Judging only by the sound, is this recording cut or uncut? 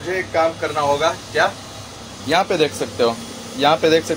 uncut